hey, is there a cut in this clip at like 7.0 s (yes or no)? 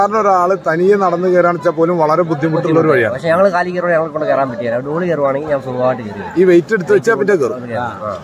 no